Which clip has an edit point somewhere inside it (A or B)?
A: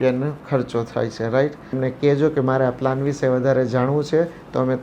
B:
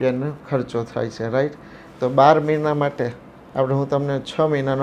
A